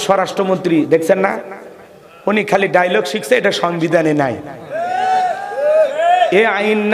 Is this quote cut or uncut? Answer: uncut